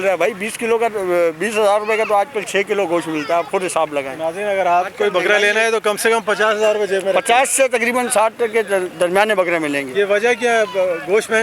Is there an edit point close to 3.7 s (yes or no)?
no